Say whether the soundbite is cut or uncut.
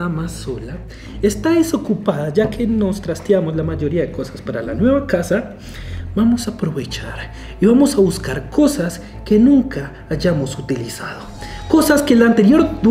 uncut